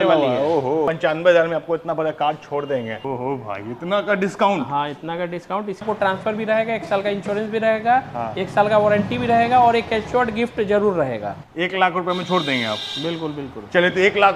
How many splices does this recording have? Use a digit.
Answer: 4